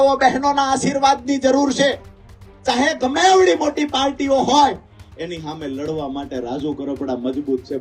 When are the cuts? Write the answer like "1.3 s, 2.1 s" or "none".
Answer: none